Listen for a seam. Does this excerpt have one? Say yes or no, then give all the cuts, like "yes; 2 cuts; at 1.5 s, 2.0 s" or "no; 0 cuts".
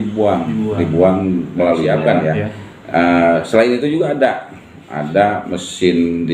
yes; 1 cut; at 2.0 s